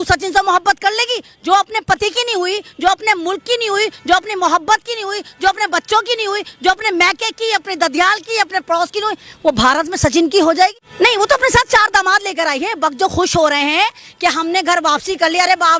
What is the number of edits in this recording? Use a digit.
1